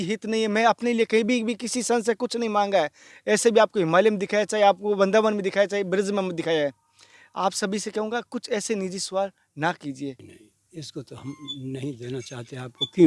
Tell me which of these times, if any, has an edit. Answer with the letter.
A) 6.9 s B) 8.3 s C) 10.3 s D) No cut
C